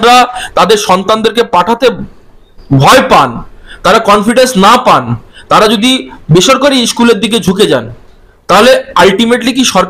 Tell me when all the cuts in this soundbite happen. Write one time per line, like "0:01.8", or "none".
none